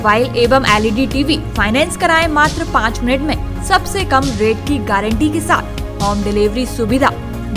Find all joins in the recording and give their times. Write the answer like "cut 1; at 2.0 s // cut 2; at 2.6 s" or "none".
none